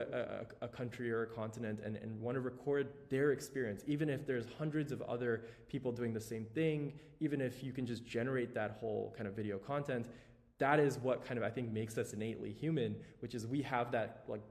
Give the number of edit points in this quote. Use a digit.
0